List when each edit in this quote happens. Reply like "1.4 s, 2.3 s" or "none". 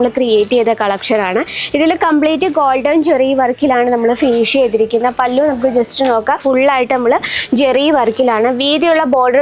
6.4 s

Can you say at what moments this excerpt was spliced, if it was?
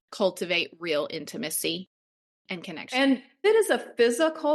3.4 s

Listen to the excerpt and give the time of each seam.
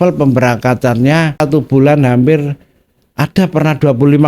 1.4 s

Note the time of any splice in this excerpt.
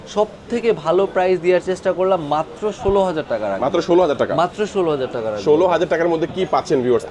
none

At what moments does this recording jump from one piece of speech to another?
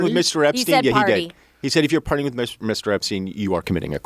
2.6 s

